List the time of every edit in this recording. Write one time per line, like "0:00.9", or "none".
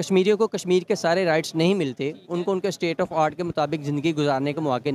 none